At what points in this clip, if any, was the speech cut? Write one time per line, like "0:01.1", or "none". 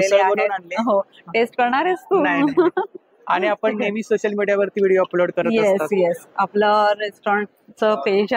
none